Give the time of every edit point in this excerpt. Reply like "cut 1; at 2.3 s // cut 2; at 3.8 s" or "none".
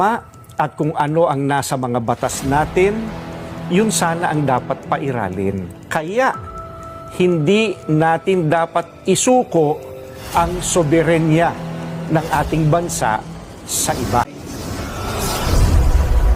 none